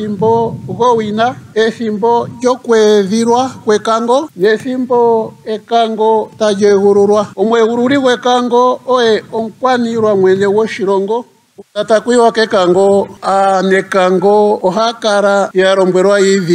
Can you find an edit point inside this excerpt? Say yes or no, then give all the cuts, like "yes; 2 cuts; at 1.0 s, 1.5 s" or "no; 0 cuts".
yes; 1 cut; at 11.3 s